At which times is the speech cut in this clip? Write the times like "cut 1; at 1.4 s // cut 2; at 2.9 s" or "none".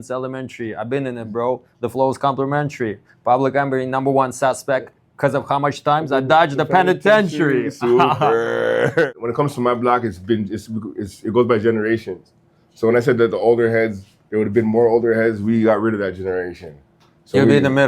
cut 1; at 9.1 s